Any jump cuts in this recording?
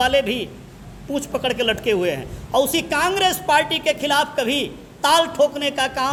no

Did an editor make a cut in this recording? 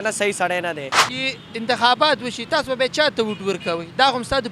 yes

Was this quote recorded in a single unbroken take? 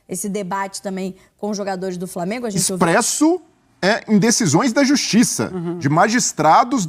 no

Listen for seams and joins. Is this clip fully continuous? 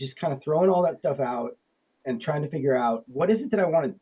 no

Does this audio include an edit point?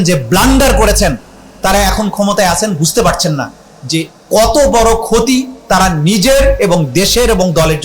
no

